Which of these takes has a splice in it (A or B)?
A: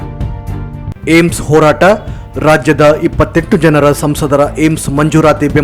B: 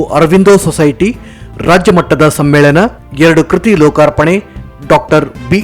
A